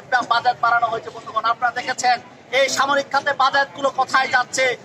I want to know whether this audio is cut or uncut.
uncut